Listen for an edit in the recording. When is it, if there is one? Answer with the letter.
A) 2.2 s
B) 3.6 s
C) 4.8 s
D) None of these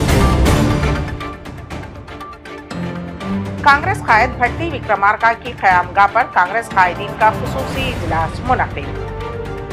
B